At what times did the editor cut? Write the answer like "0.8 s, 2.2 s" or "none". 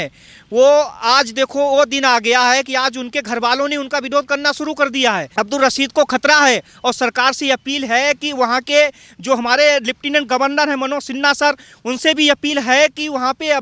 5.3 s